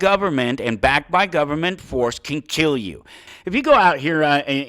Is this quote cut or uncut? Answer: cut